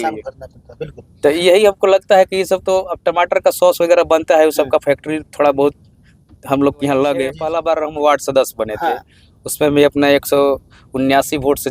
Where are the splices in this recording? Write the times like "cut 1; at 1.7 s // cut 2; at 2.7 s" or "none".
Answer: cut 1; at 7.4 s